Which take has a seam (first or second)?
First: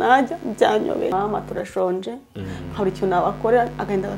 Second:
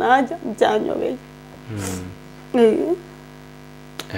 first